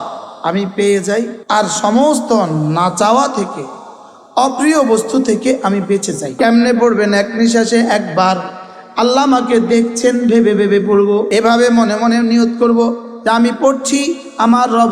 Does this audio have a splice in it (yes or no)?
yes